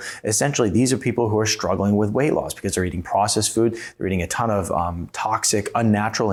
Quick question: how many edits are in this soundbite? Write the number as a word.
zero